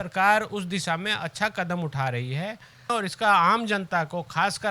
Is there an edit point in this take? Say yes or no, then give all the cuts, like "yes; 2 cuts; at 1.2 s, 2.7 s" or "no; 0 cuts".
yes; 1 cut; at 2.9 s